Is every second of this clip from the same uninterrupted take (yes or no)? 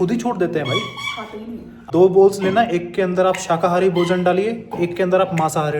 no